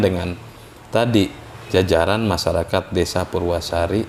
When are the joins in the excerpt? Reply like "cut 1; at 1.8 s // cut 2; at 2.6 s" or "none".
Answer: none